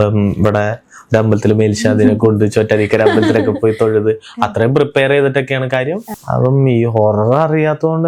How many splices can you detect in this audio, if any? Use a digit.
1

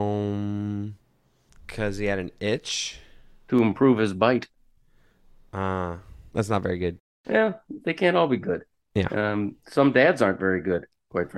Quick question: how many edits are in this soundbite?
1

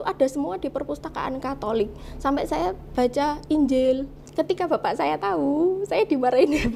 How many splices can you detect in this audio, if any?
1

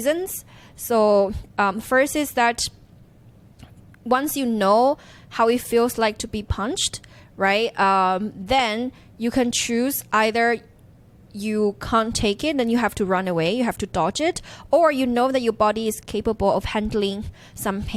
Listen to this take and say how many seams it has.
0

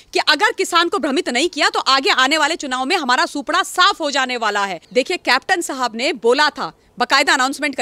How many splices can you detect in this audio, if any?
1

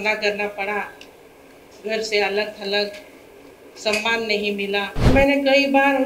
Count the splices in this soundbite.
1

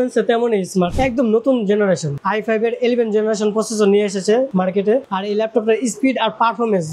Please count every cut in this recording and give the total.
1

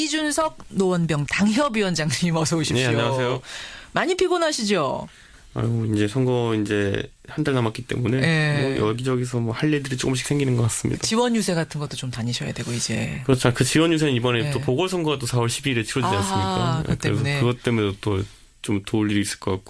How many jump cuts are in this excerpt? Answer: 0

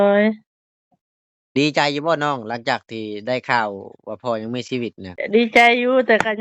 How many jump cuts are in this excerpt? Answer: 1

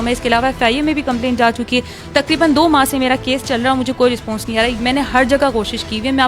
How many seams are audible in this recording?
1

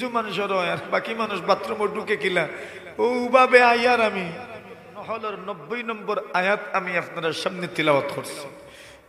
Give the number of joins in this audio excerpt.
1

